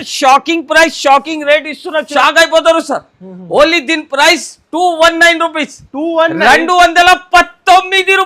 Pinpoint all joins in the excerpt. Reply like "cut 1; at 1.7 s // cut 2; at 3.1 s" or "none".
cut 1; at 2.1 s

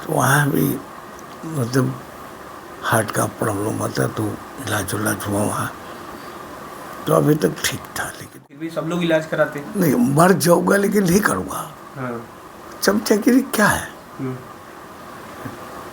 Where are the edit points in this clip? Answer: cut 1; at 8.4 s

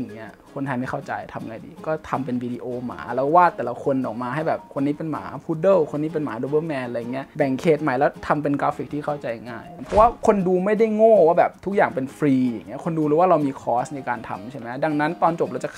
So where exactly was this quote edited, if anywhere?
cut 1; at 7.2 s // cut 2; at 9.7 s

